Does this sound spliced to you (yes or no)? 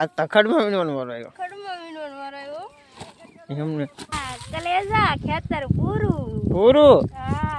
yes